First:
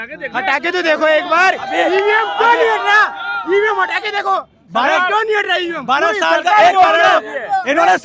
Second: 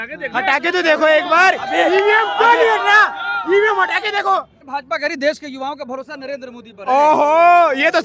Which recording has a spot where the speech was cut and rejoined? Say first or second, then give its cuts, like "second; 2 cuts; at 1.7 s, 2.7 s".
second; 1 cut; at 4.6 s